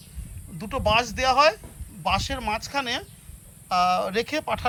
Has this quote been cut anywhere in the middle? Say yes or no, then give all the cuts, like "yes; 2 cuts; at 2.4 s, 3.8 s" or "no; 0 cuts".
no; 0 cuts